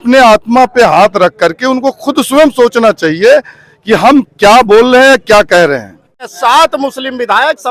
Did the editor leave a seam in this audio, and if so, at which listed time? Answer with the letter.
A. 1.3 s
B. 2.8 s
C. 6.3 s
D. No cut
C